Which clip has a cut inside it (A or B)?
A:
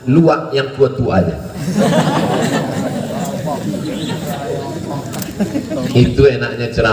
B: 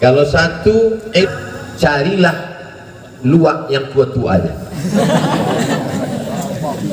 B